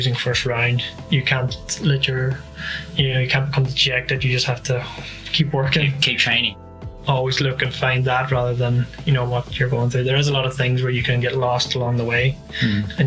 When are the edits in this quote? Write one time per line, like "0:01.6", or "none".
0:06.7